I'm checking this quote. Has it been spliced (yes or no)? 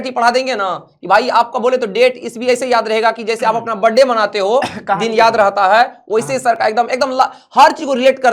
no